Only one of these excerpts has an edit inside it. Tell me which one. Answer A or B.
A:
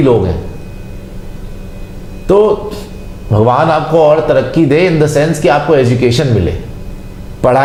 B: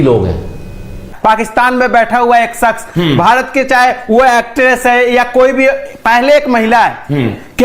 B